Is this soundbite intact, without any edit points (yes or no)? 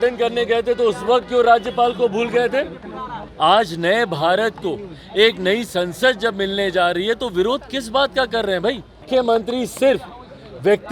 no